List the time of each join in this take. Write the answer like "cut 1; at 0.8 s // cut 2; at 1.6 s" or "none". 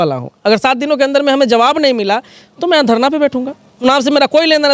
cut 1; at 3.8 s